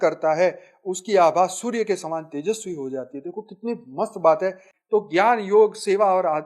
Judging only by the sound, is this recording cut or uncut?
cut